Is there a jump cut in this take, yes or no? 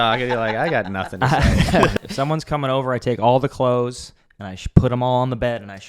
yes